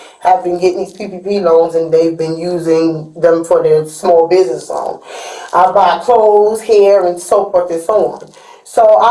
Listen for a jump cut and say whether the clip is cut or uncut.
uncut